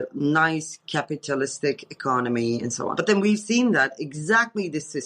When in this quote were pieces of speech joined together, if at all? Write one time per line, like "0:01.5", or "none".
0:02.9